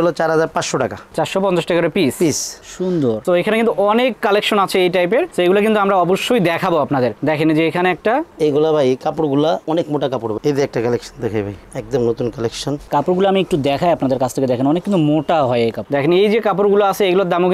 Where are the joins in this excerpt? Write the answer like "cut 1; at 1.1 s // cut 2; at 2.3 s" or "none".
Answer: cut 1; at 3.2 s // cut 2; at 10.4 s // cut 3; at 12.8 s // cut 4; at 15.8 s